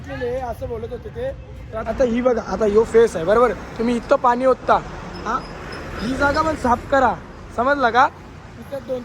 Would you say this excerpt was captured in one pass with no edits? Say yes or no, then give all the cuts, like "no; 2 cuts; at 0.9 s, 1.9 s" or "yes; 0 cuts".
no; 1 cut; at 1.7 s